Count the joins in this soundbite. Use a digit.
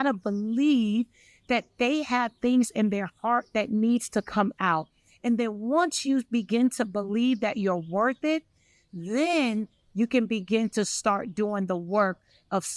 0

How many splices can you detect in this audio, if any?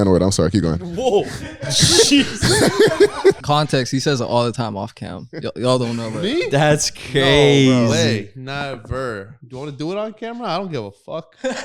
2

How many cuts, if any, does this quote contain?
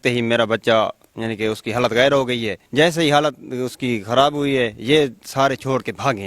1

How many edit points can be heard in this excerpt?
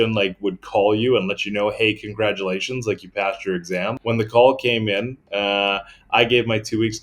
1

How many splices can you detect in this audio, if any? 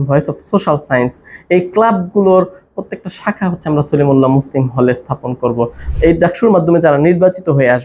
1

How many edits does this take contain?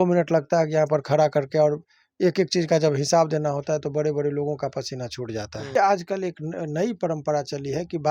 1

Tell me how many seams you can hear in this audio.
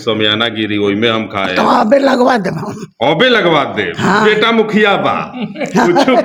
0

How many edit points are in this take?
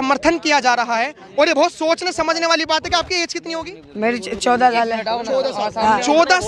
0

